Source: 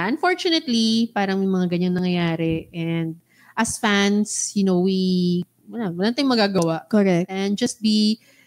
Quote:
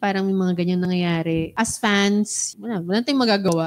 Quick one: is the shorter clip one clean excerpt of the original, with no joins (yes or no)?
no